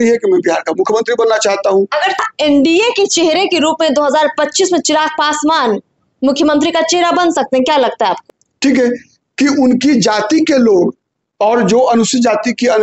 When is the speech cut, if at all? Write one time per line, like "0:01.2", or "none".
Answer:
0:02.2
0:08.2